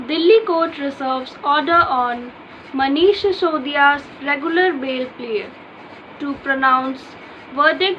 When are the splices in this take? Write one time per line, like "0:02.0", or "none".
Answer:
none